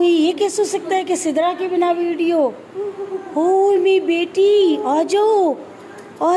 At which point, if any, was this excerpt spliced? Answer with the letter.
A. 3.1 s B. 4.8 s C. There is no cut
C